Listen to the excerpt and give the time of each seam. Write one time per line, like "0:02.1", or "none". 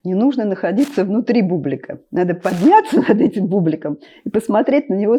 none